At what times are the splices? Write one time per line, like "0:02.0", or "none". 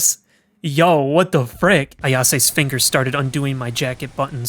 0:01.9